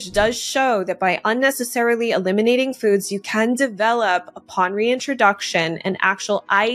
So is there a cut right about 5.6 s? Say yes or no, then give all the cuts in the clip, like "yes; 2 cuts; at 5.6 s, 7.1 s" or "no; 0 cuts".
no; 0 cuts